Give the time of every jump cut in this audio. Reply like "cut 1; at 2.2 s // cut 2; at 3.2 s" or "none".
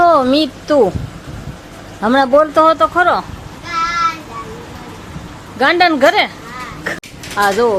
cut 1; at 6.9 s